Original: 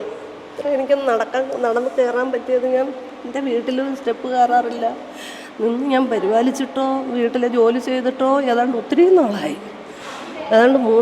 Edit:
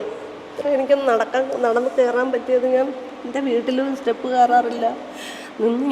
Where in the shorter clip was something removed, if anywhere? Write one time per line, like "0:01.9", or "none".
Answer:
none